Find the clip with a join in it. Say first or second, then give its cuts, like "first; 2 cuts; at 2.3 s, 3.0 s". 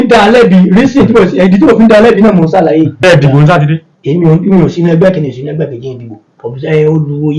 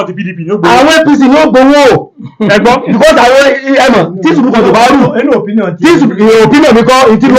first; 1 cut; at 3.0 s